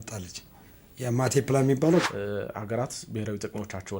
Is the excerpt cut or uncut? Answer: cut